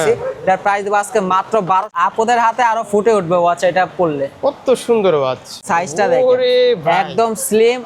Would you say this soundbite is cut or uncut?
cut